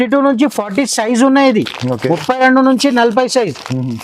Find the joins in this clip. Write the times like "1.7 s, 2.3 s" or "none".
none